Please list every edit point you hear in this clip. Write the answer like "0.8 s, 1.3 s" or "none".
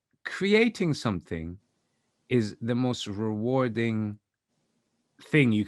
none